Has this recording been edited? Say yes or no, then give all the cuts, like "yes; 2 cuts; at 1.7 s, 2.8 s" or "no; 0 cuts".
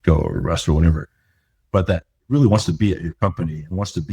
yes; 1 cut; at 2.1 s